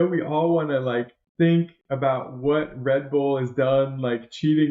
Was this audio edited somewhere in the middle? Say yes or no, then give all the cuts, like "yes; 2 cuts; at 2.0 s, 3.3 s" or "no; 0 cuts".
yes; 1 cut; at 1.2 s